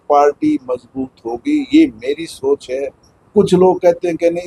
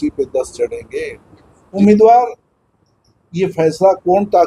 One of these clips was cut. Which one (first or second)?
second